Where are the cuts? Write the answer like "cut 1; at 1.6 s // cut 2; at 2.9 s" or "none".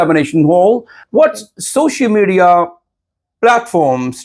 cut 1; at 0.9 s